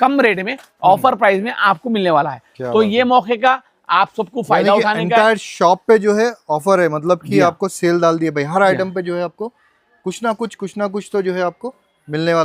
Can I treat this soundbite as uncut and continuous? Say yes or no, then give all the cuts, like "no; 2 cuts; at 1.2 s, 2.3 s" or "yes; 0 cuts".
yes; 0 cuts